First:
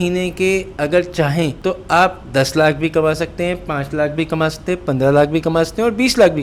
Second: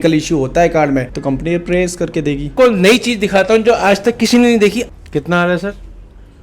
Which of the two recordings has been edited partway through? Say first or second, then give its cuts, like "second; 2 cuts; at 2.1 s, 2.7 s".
second; 2 cuts; at 2.5 s, 4.9 s